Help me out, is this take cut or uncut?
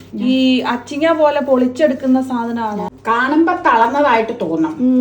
cut